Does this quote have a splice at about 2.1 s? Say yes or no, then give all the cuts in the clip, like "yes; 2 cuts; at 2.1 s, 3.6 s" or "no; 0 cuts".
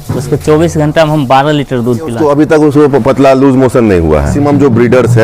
yes; 2 cuts; at 2.1 s, 4.3 s